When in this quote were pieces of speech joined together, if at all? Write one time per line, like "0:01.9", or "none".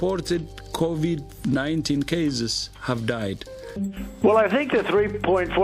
0:03.6

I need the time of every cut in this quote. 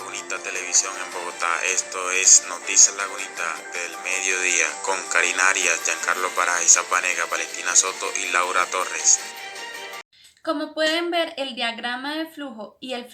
0:10.1

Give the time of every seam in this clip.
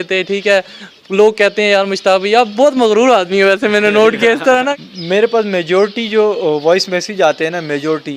0:04.7

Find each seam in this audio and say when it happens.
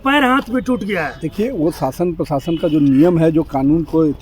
none

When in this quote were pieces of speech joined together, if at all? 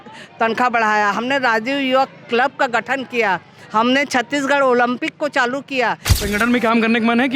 0:06.1

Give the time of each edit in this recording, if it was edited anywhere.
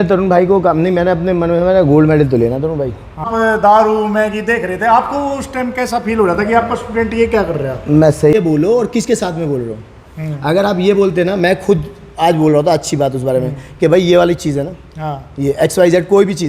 0:03.3
0:08.3

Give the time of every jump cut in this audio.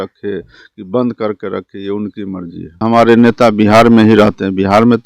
0:02.8

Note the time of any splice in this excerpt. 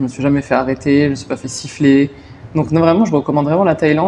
none

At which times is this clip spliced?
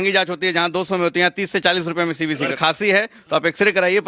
0:02.6

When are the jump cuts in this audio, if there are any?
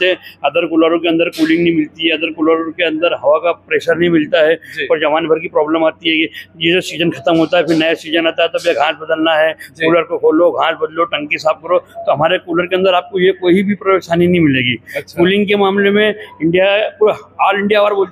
none

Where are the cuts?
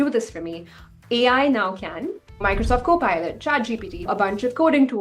0:02.3
0:04.0

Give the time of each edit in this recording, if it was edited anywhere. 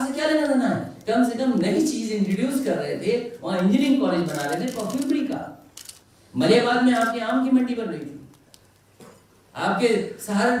none

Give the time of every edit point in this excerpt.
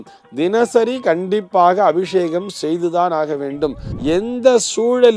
0:03.9

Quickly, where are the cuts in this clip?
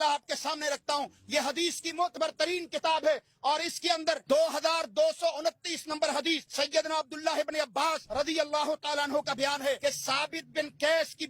0:04.2
0:06.5
0:08.0
0:09.8

